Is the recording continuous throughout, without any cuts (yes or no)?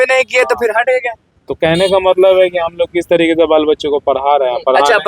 yes